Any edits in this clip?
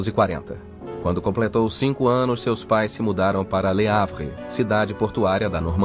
no; 0 cuts

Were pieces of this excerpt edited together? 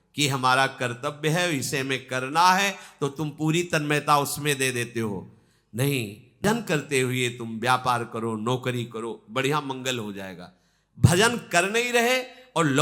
yes; 1 cut; at 6.4 s

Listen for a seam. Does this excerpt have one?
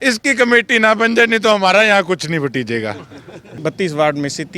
yes; 1 cut; at 3.5 s

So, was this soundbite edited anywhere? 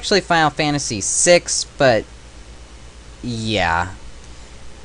yes; 1 cut; at 1.9 s

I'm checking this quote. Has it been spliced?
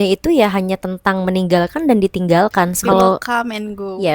yes; 1 cut; at 2.8 s

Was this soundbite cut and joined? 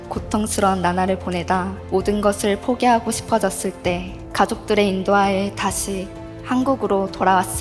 yes; 2 cuts; at 1.8 s, 4.2 s

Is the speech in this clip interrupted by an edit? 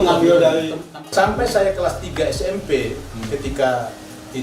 yes; 1 cut; at 0.9 s

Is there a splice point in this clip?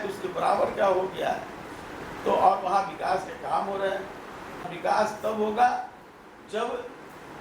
yes; 1 cut; at 4.7 s

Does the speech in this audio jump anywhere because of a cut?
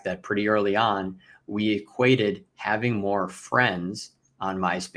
no; 0 cuts

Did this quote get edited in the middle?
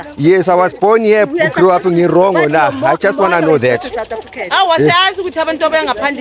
no; 0 cuts

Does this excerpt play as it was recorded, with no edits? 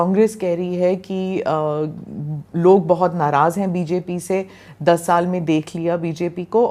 yes; 0 cuts

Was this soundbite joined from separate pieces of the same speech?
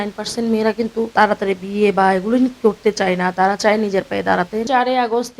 yes; 2 cuts; at 1.1 s, 4.7 s

